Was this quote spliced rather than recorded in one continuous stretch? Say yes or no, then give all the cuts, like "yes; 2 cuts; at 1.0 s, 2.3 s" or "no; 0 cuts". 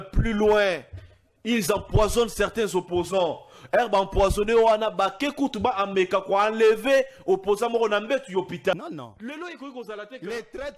yes; 1 cut; at 8.7 s